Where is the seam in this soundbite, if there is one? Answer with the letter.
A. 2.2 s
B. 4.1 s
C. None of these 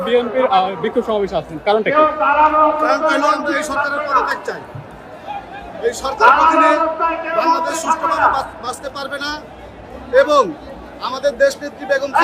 C